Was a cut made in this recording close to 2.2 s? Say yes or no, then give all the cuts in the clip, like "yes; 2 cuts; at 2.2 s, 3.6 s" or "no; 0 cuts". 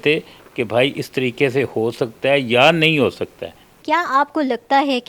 no; 1 cut; at 3.7 s